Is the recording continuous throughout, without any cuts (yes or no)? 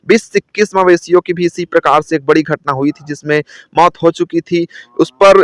yes